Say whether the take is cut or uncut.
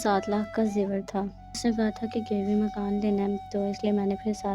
cut